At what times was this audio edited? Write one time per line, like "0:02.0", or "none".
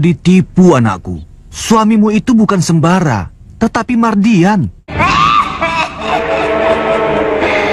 0:05.0